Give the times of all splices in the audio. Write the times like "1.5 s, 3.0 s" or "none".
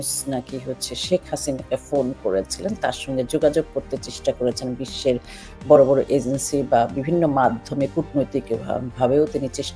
none